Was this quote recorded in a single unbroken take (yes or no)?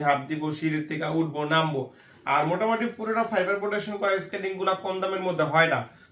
yes